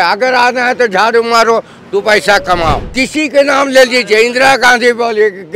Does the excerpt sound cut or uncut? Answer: cut